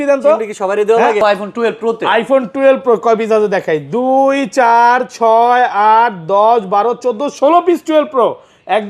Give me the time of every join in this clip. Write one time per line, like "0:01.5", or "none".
0:01.2